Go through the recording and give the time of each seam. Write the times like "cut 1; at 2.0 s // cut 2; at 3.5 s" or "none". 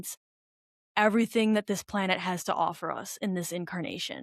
none